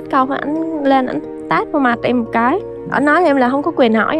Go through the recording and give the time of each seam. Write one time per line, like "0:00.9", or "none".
none